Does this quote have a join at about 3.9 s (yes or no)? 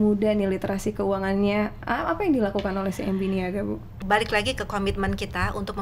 yes